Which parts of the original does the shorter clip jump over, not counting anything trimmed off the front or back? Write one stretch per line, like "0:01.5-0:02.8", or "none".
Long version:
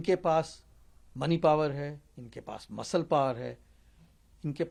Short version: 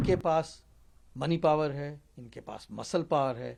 none